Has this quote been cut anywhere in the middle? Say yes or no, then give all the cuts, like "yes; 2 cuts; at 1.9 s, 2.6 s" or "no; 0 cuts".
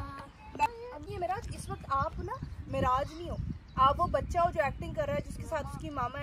yes; 1 cut; at 1.1 s